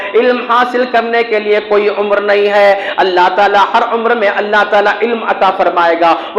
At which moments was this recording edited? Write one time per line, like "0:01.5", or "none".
none